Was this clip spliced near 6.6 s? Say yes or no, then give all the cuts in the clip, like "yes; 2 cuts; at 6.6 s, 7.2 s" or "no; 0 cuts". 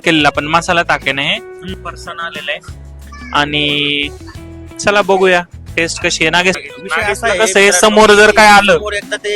yes; 2 cuts; at 1.7 s, 6.6 s